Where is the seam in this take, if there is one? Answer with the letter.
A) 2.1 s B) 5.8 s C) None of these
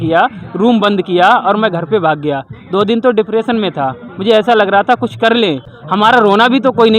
B